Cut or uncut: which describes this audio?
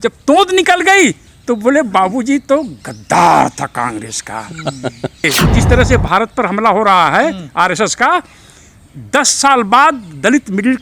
cut